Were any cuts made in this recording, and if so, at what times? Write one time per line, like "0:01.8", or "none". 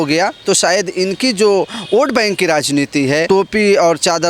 0:03.2